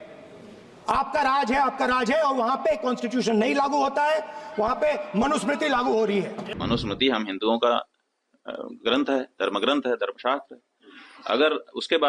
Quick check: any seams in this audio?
yes; 1 cut; at 6.4 s

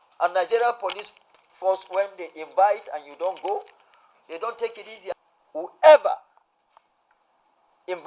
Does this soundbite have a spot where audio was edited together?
yes; 1 cut; at 5.1 s

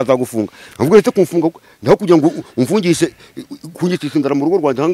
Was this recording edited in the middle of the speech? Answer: no; 0 cuts

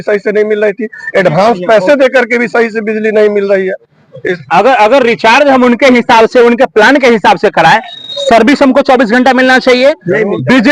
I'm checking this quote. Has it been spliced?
no; 0 cuts

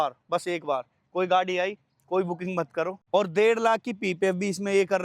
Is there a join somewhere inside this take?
yes; 1 cut; at 3.0 s

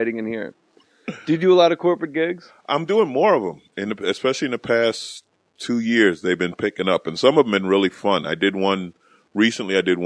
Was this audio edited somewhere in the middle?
no; 0 cuts

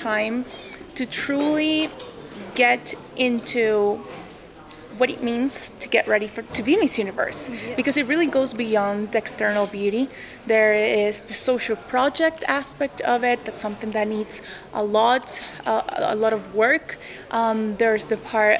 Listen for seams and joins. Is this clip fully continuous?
yes; 0 cuts

